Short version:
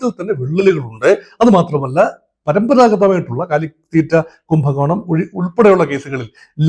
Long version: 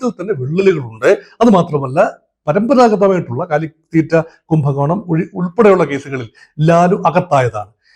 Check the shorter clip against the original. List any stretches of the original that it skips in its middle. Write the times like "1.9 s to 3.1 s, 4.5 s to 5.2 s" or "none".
none